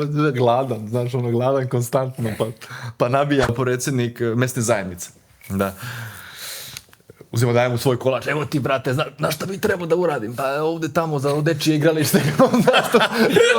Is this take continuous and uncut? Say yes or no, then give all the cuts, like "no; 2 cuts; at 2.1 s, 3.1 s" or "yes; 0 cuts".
no; 1 cut; at 3.5 s